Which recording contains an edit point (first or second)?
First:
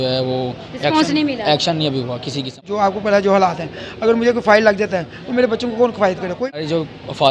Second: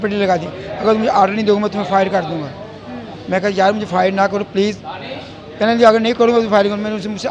first